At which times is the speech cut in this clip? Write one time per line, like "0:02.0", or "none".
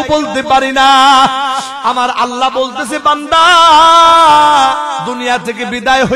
0:01.7
0:05.1